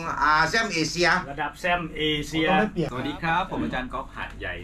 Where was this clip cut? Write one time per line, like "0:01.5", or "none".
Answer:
0:02.9